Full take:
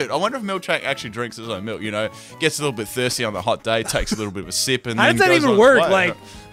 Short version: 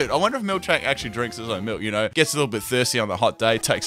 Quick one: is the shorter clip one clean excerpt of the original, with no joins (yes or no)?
no